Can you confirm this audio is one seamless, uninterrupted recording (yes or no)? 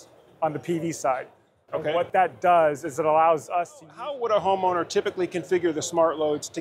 no